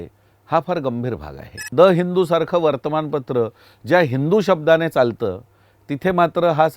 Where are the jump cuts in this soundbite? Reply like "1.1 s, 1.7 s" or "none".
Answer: 1.7 s